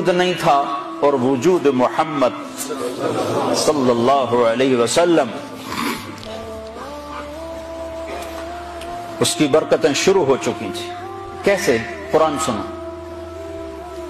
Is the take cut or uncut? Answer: cut